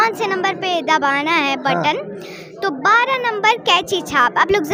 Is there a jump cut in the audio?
no; 0 cuts

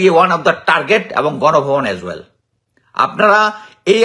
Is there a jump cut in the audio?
no; 0 cuts

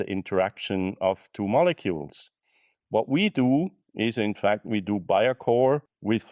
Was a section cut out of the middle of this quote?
no; 0 cuts

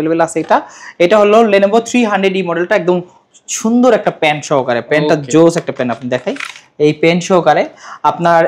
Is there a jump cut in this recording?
no; 0 cuts

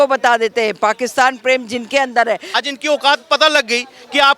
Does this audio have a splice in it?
yes; 1 cut; at 2.5 s

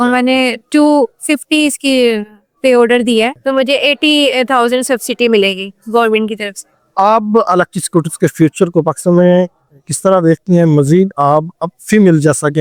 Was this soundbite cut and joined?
no; 0 cuts

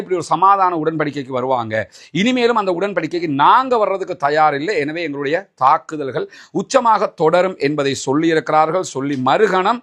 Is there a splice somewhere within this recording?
no; 0 cuts

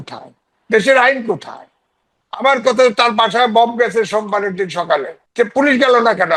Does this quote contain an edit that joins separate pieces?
yes; 1 cut; at 5.2 s

